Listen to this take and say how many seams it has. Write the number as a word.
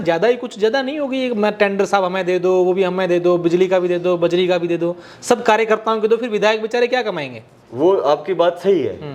zero